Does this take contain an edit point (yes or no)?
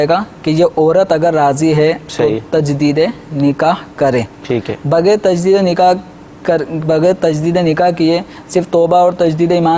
no